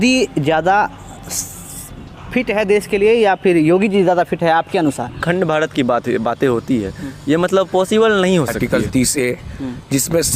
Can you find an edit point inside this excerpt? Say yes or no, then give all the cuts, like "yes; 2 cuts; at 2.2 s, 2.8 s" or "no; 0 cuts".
yes; 2 cuts; at 5.2 s, 8.6 s